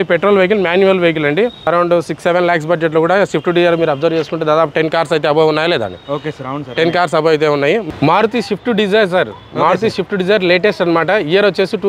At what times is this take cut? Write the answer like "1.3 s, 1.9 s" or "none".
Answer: 1.6 s, 7.8 s